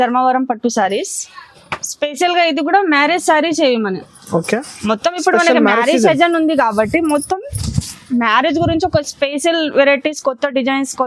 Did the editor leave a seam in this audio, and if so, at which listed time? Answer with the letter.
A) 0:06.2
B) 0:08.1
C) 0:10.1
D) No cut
D